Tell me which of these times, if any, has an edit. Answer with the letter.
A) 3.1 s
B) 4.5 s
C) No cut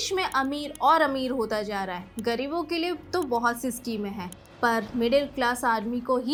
C